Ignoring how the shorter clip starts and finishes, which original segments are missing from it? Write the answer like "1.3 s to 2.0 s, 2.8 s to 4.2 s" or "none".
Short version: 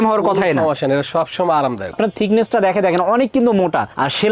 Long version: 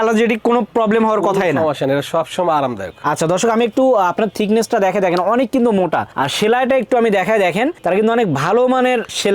2.9 s to 4.1 s